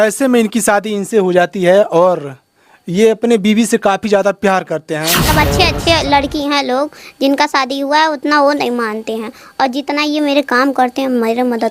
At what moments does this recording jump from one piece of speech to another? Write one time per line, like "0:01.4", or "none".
0:05.2